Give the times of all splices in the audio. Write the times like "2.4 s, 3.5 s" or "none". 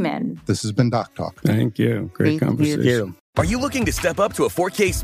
3.2 s